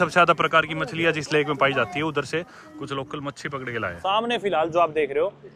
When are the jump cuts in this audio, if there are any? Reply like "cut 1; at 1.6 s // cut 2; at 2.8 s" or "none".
cut 1; at 4.0 s